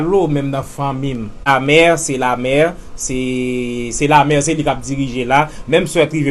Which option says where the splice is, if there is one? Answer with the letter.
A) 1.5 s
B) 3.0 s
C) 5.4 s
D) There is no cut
A